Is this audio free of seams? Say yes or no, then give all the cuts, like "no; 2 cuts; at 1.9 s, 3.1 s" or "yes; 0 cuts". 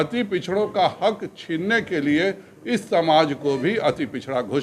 yes; 0 cuts